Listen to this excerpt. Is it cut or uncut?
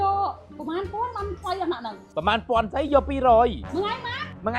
cut